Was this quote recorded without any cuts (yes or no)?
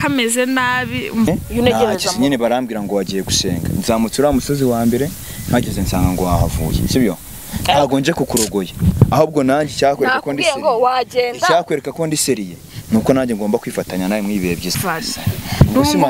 no